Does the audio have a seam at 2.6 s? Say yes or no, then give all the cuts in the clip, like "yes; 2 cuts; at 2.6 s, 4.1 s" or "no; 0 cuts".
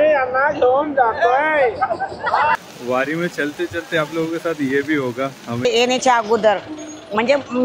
yes; 2 cuts; at 2.6 s, 5.6 s